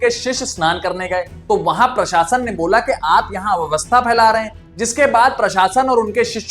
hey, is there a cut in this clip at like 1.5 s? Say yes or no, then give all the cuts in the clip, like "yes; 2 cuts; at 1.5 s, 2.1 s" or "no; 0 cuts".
yes; 1 cut; at 1.5 s